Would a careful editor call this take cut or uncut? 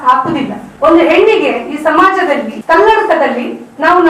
cut